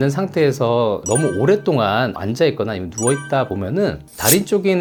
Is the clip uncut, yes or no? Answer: yes